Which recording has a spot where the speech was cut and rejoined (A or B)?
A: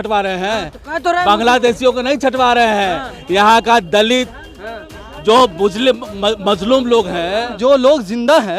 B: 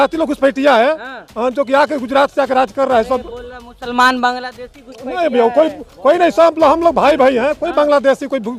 A